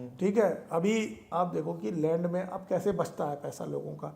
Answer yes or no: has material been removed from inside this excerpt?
yes